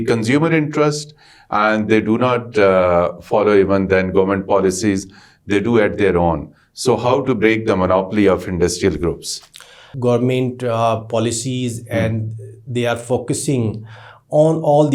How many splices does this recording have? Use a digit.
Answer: 1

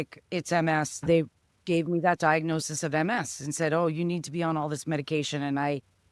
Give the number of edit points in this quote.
1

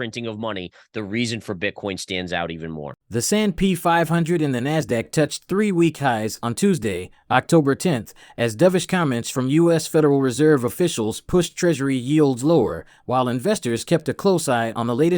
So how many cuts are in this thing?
0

